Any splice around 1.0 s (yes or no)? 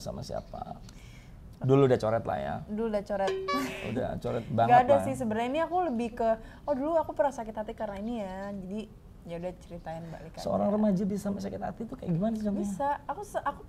no